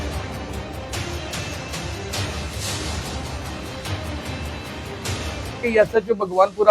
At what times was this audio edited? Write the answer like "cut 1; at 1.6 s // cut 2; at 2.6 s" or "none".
cut 1; at 5.6 s